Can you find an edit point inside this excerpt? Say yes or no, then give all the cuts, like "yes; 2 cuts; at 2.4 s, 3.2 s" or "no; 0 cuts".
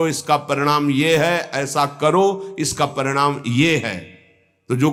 no; 0 cuts